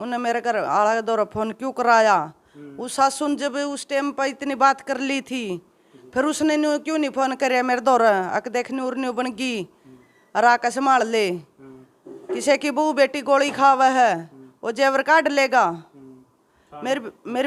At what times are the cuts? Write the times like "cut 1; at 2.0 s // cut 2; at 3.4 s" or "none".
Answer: none